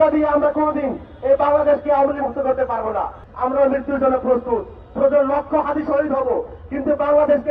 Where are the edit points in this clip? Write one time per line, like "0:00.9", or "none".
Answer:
0:03.2